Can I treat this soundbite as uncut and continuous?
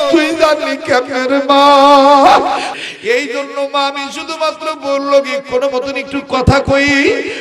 no; 1 cut; at 2.8 s

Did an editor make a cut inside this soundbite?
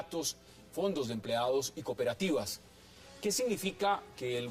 yes; 1 cut; at 2.0 s

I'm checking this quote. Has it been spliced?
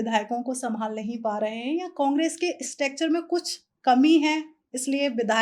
no; 0 cuts

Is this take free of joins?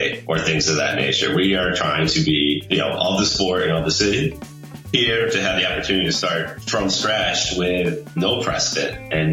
no; 1 cut; at 4.7 s

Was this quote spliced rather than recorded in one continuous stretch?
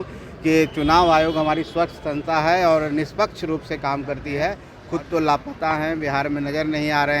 yes; 1 cut; at 4.7 s

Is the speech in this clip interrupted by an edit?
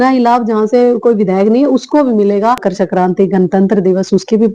yes; 1 cut; at 2.7 s

